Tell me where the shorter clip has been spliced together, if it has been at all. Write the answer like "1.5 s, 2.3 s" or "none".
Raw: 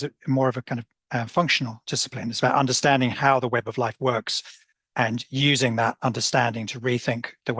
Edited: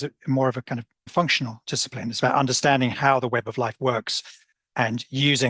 1.1 s

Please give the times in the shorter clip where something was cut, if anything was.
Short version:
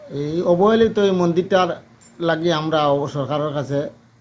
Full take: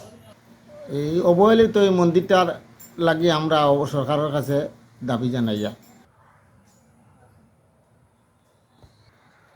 none

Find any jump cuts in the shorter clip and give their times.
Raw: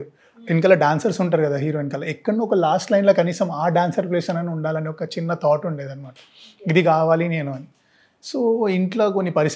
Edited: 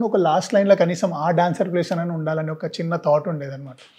none

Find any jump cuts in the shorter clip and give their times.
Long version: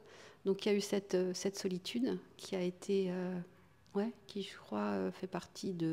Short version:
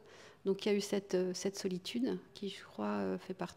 2.3 s

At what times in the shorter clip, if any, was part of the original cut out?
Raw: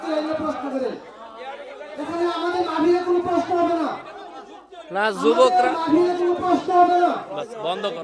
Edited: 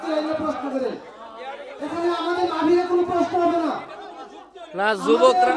1.7 s

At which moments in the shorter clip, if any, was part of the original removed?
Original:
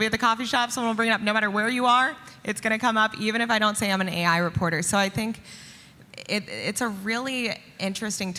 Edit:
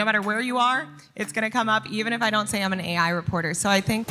none

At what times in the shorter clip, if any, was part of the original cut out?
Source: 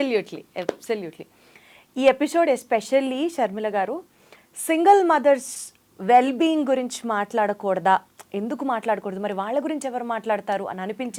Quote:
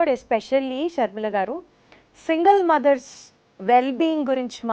none

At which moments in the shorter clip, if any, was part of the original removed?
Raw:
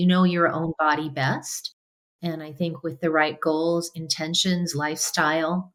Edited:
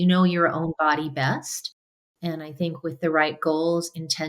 none

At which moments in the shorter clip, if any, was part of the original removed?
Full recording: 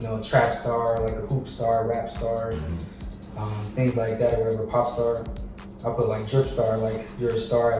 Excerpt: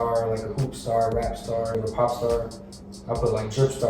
1.8 s

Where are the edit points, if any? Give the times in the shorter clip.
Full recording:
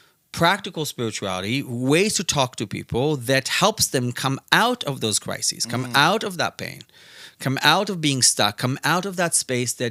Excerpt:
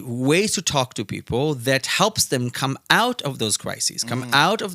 none

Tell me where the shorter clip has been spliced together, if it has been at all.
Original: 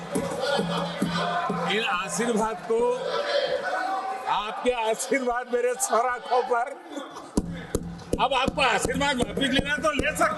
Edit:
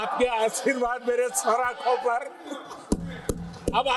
none

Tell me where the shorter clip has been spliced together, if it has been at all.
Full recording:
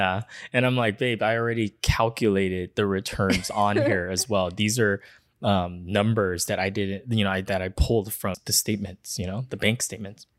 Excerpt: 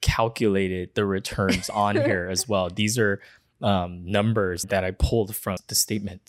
4.6 s

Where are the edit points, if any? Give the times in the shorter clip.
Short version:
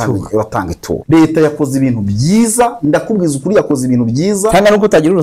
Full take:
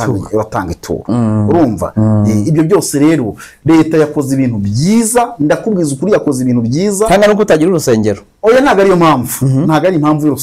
0.9 s

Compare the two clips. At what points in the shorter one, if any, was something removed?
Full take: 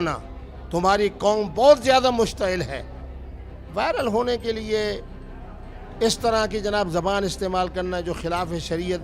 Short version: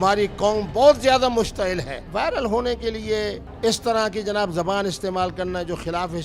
2.0 s, 3.4 s

